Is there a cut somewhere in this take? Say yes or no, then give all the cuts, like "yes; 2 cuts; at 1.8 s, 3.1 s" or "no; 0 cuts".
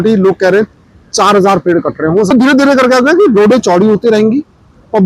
yes; 1 cut; at 2.3 s